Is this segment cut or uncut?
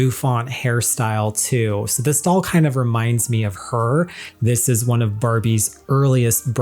cut